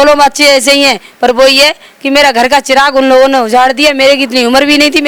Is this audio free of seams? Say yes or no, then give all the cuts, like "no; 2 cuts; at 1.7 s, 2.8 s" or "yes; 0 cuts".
yes; 0 cuts